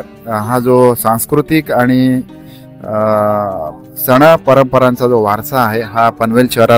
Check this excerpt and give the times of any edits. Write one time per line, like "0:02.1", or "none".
none